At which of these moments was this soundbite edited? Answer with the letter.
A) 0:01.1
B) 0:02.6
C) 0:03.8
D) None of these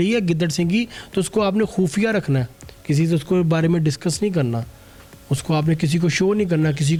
D